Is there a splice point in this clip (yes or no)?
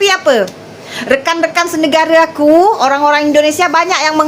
no